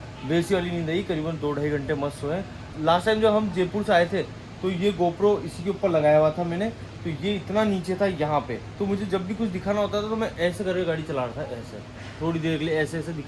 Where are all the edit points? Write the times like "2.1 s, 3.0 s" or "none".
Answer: 2.6 s, 8.6 s